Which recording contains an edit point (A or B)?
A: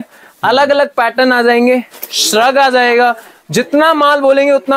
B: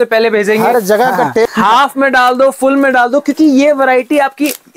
B